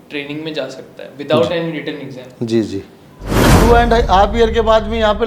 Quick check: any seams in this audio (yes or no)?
yes